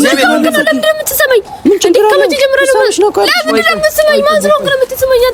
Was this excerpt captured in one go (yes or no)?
yes